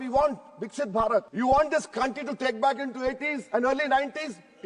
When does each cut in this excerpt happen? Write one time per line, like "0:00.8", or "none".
0:01.3